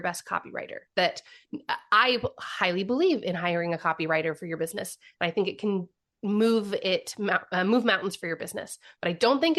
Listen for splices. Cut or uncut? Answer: uncut